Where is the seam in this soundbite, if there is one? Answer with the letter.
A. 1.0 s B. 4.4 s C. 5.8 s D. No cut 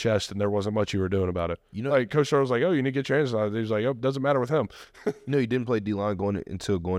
D